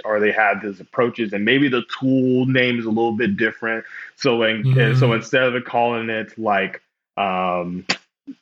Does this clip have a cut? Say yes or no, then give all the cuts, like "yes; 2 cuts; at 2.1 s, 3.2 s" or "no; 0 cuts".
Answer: no; 0 cuts